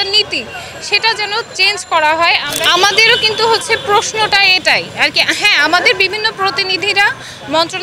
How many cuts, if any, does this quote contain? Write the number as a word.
one